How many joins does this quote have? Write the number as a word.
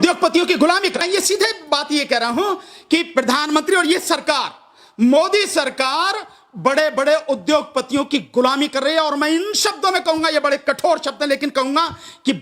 one